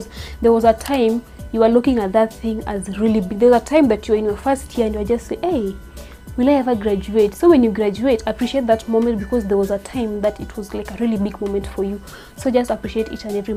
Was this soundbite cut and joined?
no; 0 cuts

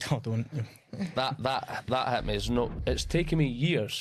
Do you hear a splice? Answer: yes; 1 cut; at 2.8 s

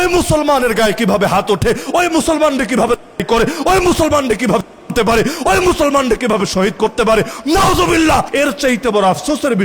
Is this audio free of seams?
no; 1 cut; at 8.3 s

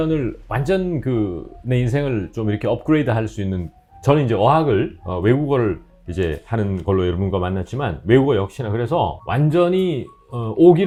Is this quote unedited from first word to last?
yes; 0 cuts

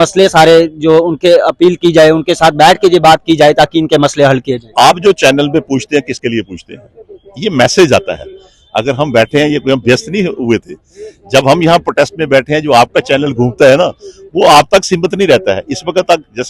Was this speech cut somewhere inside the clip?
no; 0 cuts

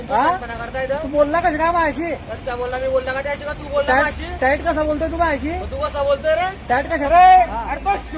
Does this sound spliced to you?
yes; 1 cut; at 7.0 s

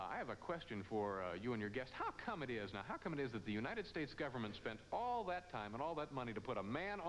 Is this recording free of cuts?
yes; 0 cuts

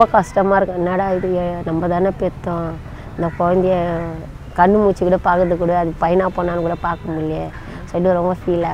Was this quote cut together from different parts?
no; 0 cuts

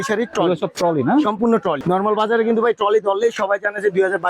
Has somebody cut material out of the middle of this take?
yes; 1 cut; at 1.8 s

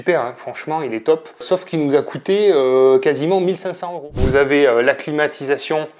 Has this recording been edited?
yes; 1 cut; at 4.0 s

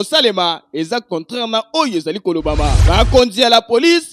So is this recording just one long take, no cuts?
no; 1 cut; at 2.8 s

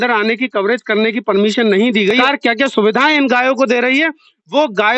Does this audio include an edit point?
yes; 1 cut; at 2.2 s

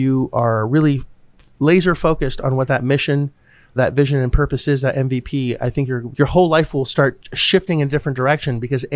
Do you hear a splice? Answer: no; 0 cuts

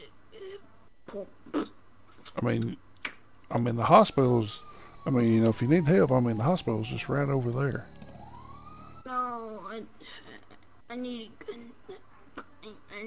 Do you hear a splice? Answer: no; 0 cuts

